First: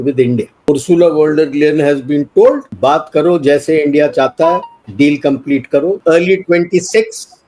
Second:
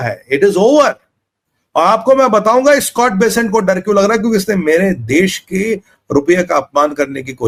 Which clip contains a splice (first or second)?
first